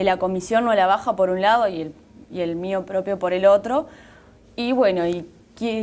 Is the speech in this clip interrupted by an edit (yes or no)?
no